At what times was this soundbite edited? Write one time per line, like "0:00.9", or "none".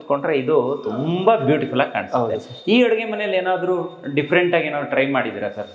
none